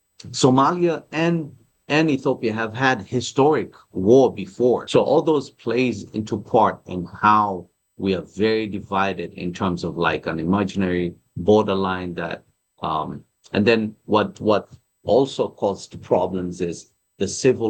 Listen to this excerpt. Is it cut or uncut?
cut